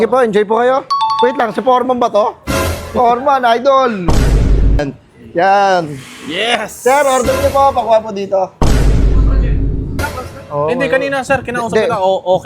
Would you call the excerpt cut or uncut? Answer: cut